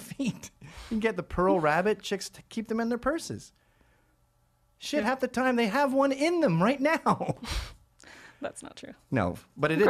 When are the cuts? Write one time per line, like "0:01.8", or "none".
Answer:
none